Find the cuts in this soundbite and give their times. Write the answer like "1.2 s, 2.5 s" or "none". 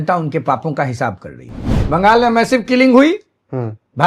1.7 s